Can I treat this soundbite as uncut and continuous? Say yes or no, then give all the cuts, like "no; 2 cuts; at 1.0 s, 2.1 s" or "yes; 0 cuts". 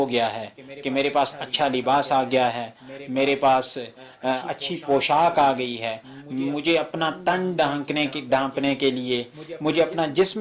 yes; 0 cuts